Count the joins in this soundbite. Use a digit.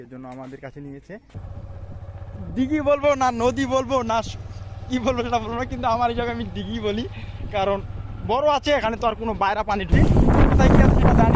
2